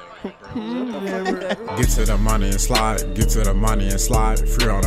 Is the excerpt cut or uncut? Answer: cut